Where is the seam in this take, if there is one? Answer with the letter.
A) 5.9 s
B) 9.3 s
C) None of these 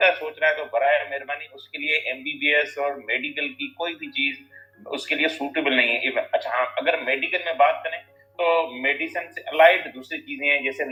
C